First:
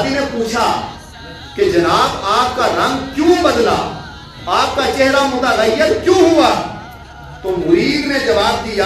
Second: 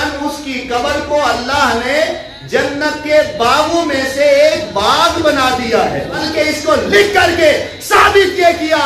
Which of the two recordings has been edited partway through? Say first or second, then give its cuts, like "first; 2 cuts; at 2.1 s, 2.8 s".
second; 1 cut; at 6.2 s